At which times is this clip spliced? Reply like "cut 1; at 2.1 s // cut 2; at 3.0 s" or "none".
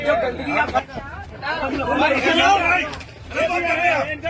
none